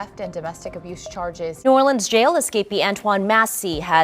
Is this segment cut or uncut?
cut